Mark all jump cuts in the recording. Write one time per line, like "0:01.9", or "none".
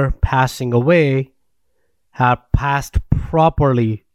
none